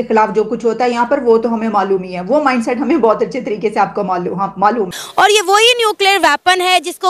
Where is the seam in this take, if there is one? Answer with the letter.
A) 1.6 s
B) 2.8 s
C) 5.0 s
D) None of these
C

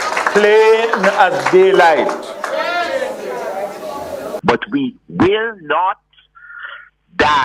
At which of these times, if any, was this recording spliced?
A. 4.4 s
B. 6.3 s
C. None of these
A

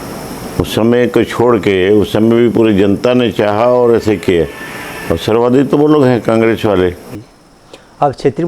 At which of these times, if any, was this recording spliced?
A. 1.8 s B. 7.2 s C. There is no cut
B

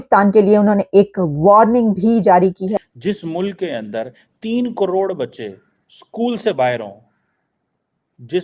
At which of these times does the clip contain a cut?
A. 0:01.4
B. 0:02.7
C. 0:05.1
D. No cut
B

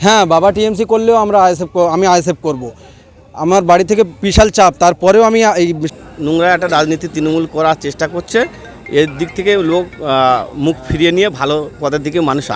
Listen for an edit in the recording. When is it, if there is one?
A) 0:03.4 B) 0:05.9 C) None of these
B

